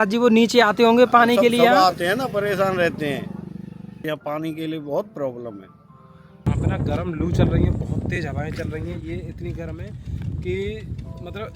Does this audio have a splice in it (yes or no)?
yes